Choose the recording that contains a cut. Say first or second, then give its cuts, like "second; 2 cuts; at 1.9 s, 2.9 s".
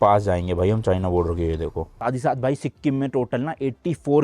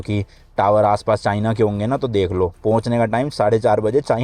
first; 1 cut; at 2.0 s